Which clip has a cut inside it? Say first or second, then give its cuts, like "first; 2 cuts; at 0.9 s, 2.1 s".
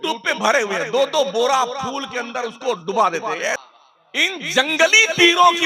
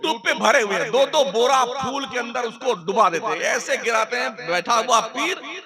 first; 1 cut; at 3.6 s